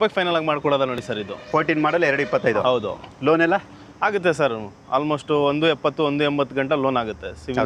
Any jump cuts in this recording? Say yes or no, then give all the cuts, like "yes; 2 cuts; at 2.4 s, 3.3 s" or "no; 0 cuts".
no; 0 cuts